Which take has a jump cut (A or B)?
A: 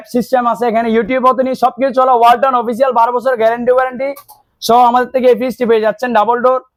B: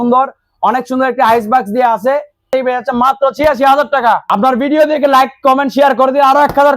B